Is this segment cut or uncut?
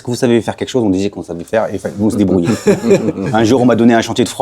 uncut